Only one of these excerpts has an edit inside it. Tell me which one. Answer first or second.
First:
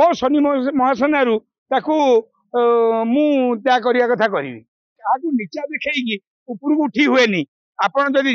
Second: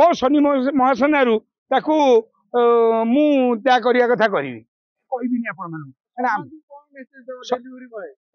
first